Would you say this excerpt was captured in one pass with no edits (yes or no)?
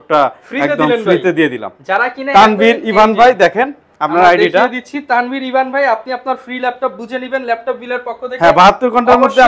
yes